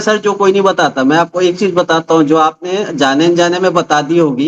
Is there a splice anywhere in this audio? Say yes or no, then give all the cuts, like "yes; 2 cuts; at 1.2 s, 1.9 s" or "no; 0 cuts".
no; 0 cuts